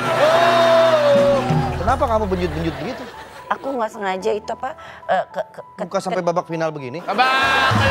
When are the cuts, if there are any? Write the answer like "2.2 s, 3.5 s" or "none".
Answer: 1.8 s